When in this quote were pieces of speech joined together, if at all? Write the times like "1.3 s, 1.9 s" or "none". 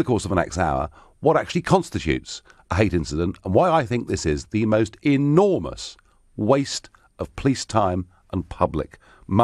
8.3 s